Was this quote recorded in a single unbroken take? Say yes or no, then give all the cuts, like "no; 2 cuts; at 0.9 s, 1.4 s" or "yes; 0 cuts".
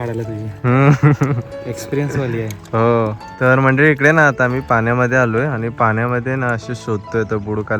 no; 1 cut; at 3.2 s